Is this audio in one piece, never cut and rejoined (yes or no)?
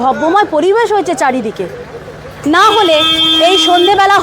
no